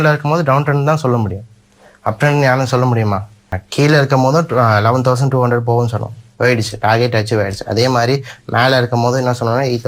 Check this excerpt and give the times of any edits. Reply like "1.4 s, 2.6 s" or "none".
3.6 s